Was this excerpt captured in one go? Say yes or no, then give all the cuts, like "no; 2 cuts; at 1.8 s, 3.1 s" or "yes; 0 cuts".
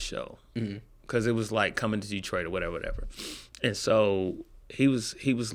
yes; 0 cuts